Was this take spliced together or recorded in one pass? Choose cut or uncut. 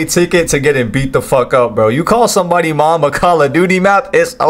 uncut